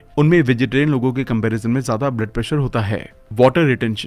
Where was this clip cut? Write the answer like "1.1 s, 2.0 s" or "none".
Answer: none